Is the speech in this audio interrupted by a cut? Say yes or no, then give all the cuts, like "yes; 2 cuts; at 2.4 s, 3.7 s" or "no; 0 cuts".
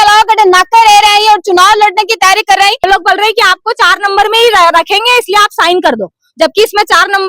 yes; 1 cut; at 2.9 s